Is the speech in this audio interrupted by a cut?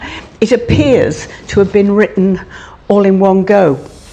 no; 0 cuts

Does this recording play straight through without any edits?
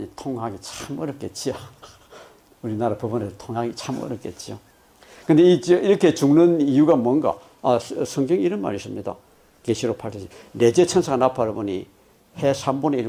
yes; 0 cuts

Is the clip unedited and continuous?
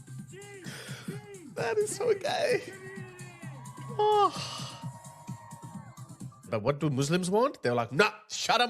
no; 1 cut; at 6.5 s

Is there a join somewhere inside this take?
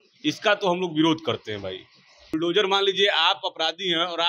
yes; 1 cut; at 2.3 s

